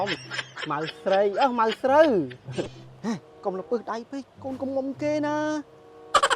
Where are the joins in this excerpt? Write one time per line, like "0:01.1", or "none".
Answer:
0:02.8